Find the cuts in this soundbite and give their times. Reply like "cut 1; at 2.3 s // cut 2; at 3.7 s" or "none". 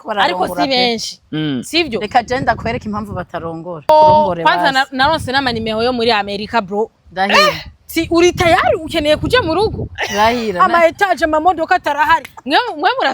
cut 1; at 3.9 s